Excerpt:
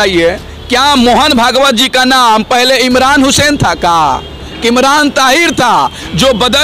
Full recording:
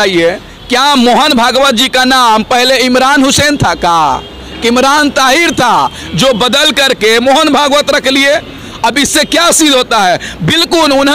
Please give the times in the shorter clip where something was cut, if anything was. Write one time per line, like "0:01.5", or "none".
none